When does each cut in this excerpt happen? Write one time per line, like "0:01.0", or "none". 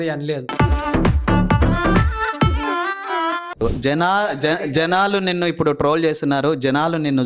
0:03.6